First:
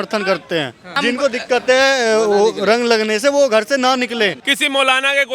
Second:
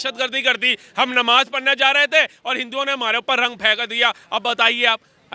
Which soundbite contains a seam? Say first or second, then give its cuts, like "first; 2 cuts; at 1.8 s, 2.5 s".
first; 2 cuts; at 1.0 s, 4.4 s